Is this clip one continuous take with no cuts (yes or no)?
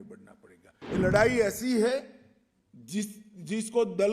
no